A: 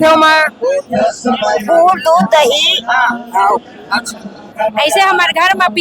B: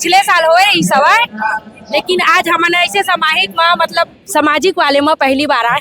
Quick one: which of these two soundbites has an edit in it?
A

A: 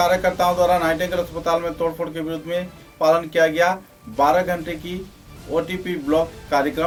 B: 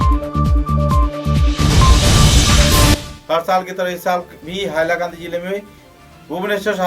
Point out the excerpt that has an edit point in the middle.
B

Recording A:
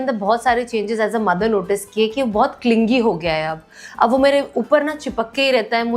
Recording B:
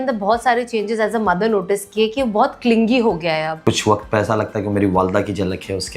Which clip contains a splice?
B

